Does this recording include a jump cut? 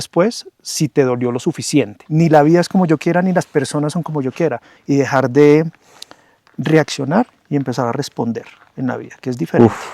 yes; 2 cuts; at 2.0 s, 4.7 s

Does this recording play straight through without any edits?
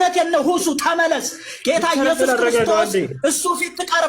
yes; 0 cuts

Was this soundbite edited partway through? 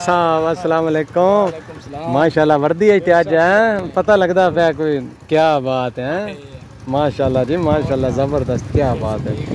no; 0 cuts

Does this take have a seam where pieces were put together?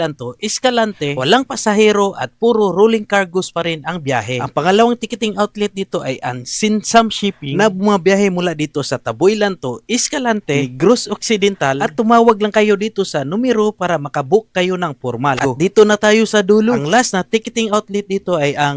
yes; 1 cut; at 15.4 s

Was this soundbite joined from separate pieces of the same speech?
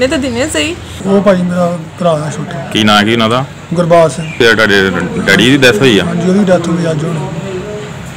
yes; 2 cuts; at 0.9 s, 4.4 s

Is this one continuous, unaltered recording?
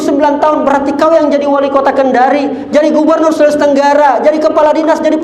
yes; 0 cuts

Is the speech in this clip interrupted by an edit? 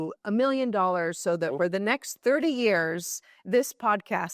no; 0 cuts

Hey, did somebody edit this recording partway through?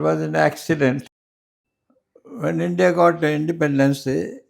yes; 1 cut; at 1.1 s

